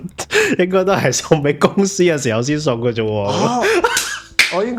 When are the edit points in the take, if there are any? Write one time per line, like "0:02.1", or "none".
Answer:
none